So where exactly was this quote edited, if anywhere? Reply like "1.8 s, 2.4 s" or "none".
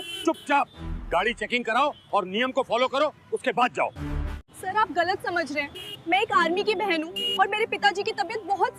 none